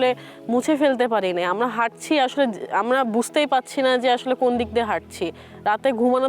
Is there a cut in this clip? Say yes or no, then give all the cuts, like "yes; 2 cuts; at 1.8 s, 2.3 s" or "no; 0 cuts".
no; 0 cuts